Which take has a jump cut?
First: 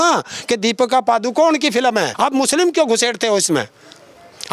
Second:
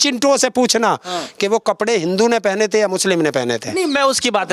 first; 1 cut; at 2.1 s

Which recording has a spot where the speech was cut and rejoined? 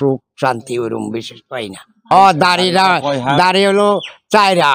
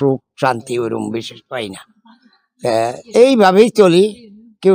first; 1 cut; at 2.1 s

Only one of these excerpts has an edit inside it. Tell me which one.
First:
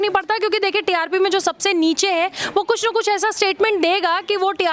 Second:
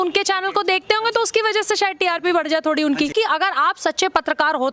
second; 1 cut; at 3.1 s

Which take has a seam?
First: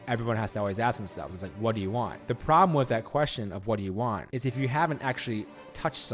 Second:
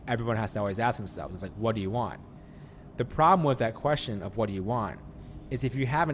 first; 2 cuts; at 2.2 s, 4.3 s

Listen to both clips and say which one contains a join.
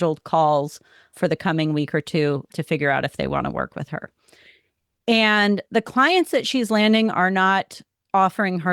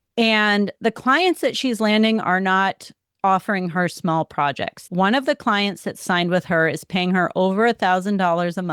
second; 1 cut; at 4.9 s

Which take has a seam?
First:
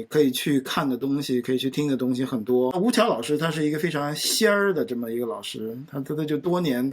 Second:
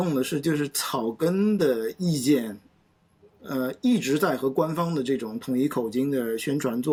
first; 1 cut; at 2.7 s

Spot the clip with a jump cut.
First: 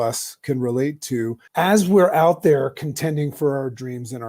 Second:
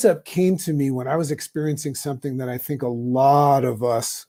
first; 1 cut; at 1.4 s

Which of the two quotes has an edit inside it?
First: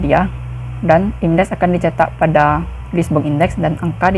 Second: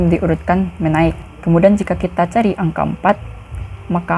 second; 1 cut; at 1.3 s

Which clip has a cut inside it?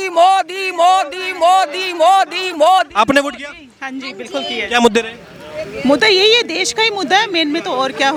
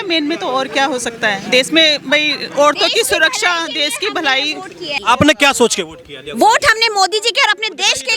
second; 1 cut; at 5.0 s

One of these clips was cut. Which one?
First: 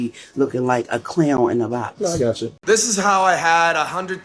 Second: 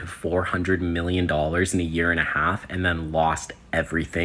first; 1 cut; at 2.5 s

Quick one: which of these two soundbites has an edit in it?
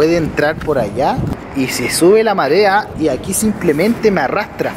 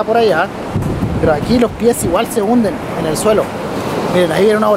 first; 2 cuts; at 1.4 s, 2.9 s

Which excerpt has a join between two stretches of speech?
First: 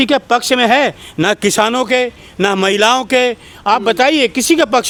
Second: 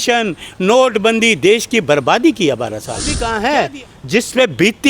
second; 1 cut; at 3.2 s

